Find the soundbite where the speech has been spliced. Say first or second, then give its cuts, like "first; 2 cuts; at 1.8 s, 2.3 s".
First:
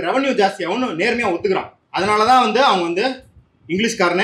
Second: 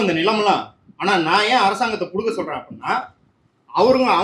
first; 1 cut; at 1.8 s